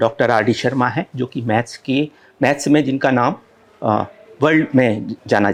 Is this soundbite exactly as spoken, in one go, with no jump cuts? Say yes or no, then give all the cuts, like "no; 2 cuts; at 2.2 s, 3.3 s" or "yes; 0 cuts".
yes; 0 cuts